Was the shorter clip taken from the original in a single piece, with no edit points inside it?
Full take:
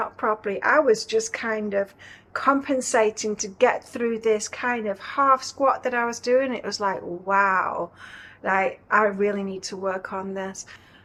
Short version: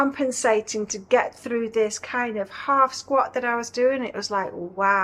yes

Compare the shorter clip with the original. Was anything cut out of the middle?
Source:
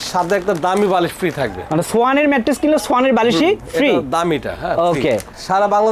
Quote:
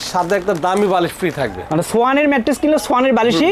no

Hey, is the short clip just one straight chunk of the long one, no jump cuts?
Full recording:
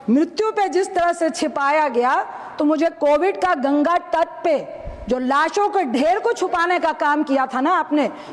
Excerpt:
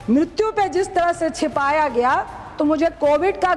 yes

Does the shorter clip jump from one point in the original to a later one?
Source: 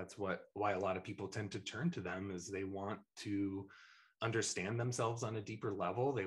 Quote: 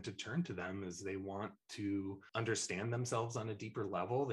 yes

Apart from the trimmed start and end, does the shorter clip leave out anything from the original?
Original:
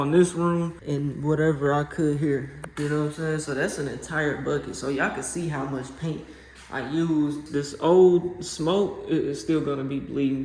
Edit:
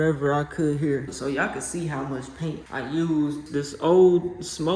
yes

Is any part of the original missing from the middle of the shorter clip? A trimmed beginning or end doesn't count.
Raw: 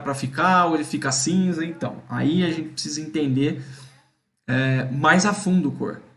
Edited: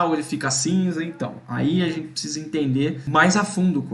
yes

